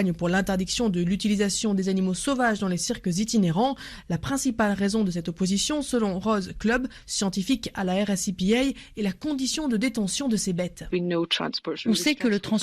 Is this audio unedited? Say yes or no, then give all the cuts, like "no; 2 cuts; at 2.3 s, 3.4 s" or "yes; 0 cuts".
no; 2 cuts; at 3.9 s, 10.8 s